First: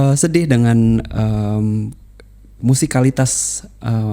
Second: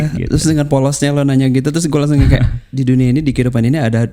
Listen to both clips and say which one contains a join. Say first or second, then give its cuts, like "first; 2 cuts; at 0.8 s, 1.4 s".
second; 1 cut; at 2.7 s